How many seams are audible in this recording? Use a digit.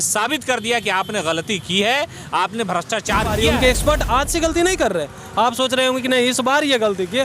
1